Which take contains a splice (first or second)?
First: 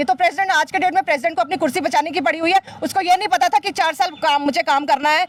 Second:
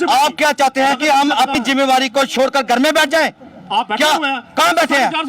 second